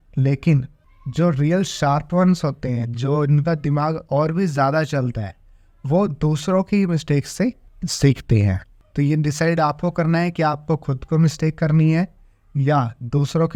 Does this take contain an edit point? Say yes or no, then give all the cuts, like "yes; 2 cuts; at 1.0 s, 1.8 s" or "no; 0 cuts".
no; 0 cuts